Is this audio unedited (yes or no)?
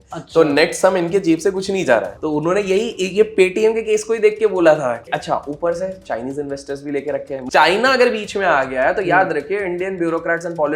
no